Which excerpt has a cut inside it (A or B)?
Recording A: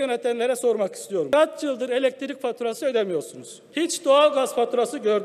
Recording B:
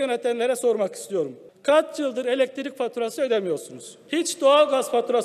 A